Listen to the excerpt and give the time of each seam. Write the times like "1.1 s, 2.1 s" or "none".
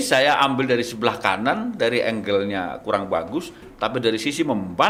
none